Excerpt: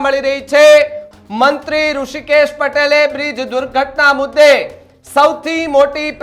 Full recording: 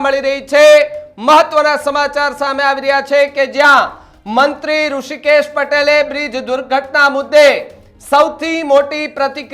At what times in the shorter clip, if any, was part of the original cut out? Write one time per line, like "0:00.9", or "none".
0:01.1